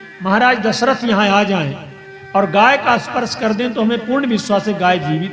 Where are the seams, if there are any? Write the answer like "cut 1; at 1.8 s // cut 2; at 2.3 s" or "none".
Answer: none